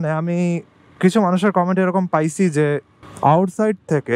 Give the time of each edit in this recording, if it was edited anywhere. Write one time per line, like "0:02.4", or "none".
none